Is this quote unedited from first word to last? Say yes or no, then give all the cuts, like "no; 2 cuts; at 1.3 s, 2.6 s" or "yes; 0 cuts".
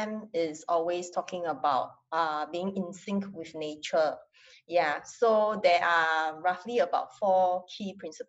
yes; 0 cuts